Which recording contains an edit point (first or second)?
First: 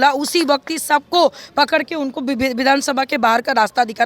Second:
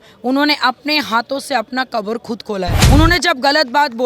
second